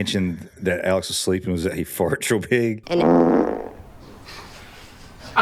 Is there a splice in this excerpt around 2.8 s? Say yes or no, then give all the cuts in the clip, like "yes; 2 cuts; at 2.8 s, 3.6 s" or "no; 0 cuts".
yes; 1 cut; at 2.8 s